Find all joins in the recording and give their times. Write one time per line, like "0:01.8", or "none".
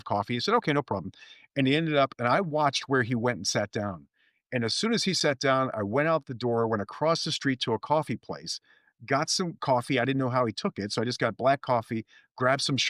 none